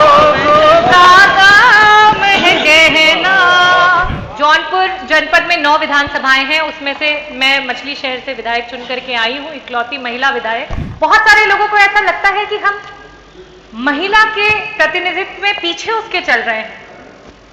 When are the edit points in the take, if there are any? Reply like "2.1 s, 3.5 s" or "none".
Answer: 4.2 s, 10.8 s